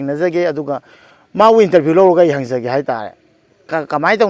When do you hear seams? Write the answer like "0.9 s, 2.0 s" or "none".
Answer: none